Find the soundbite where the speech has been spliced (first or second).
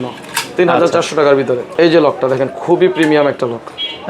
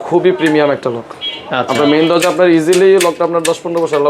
first